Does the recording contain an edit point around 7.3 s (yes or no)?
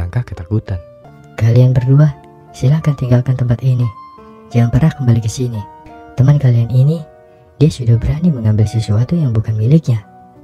no